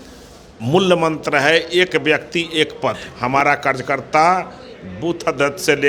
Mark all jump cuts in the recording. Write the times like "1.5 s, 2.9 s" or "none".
3.1 s